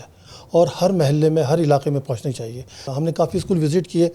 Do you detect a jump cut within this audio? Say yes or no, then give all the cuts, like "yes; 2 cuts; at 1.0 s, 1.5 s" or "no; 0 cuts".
yes; 1 cut; at 2.8 s